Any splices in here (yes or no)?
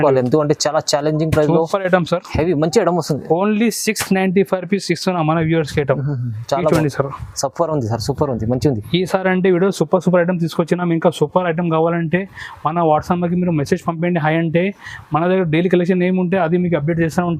no